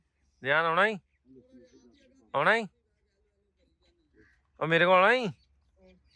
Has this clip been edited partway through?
no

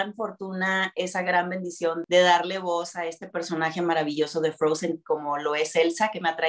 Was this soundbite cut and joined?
no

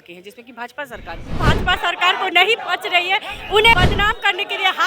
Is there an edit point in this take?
yes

